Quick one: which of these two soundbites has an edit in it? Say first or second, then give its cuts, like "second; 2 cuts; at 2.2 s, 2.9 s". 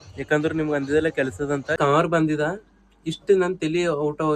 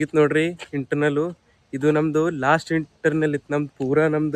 first; 1 cut; at 1.7 s